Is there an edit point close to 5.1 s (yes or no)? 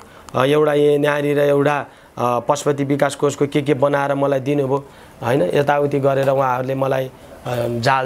no